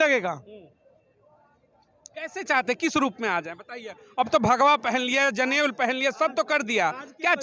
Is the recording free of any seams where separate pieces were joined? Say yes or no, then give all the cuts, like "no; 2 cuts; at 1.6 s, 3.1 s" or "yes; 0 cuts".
yes; 0 cuts